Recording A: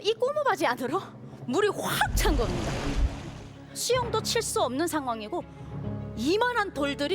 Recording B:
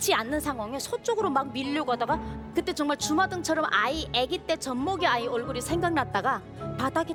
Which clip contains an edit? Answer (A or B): A